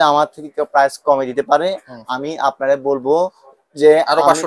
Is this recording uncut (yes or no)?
yes